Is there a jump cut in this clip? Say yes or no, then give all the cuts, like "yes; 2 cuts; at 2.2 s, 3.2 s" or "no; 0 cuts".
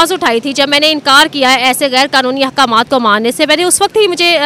no; 0 cuts